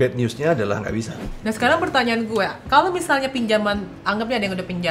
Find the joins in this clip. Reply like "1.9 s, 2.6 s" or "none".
1.3 s